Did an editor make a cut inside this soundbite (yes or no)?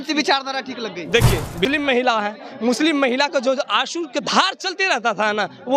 yes